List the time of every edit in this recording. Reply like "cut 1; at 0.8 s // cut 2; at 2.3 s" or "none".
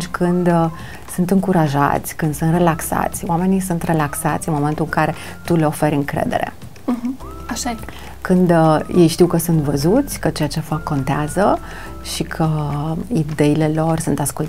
none